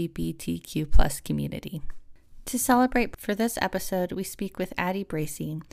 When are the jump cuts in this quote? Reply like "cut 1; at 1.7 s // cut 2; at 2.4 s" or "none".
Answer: none